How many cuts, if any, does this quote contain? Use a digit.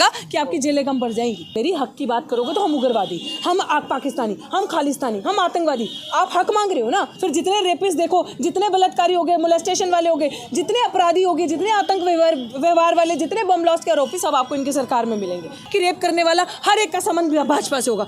3